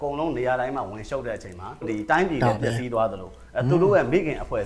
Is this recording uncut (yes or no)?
no